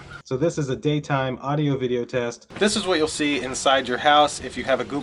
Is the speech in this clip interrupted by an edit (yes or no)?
yes